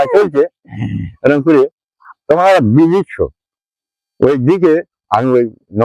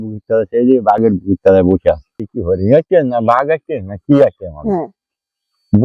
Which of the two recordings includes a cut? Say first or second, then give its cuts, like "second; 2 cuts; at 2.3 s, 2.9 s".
second; 1 cut; at 2.3 s